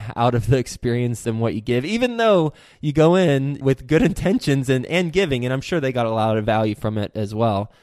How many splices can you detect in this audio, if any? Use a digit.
2